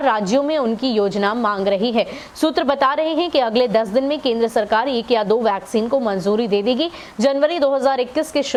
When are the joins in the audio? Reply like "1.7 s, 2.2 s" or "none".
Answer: none